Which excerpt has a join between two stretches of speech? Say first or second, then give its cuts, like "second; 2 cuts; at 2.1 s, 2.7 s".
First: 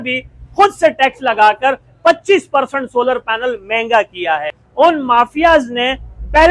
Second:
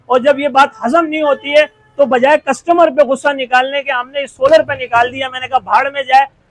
first; 1 cut; at 4.6 s